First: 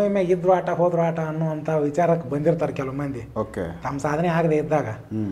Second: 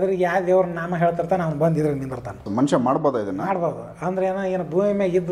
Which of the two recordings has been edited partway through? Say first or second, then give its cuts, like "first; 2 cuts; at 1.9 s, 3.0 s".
second; 1 cut; at 2.5 s